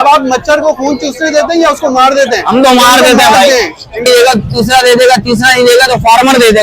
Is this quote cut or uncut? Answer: cut